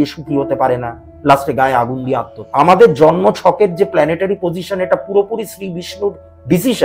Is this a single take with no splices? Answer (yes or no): no